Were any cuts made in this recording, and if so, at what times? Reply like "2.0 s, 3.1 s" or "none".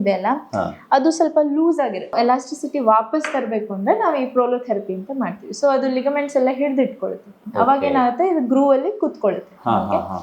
2.1 s